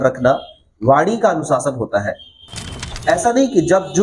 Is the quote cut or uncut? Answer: cut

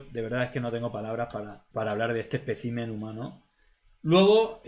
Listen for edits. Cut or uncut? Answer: uncut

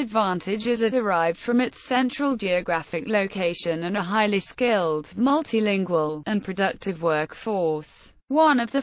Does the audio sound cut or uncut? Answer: cut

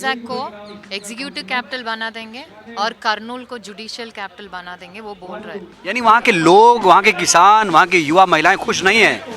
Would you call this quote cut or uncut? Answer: cut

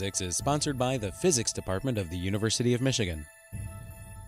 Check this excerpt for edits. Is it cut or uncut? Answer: cut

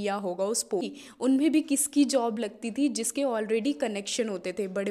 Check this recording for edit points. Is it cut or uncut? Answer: cut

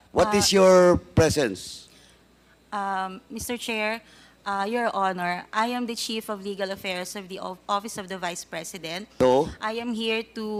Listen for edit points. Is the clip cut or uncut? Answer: uncut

